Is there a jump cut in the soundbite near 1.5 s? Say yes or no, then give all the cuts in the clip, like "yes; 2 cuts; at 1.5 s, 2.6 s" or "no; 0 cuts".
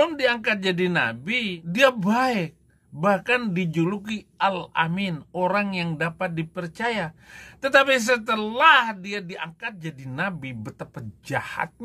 yes; 1 cut; at 1.5 s